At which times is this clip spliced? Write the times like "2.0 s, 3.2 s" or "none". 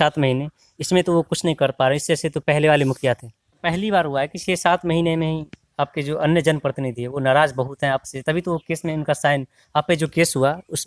3.5 s